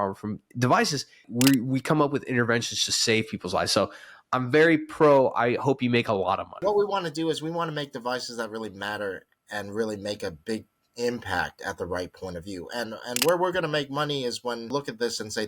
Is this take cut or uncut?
cut